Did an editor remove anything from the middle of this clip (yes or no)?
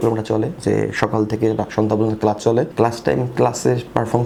no